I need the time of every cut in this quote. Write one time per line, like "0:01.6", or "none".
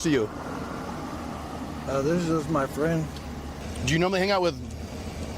0:03.5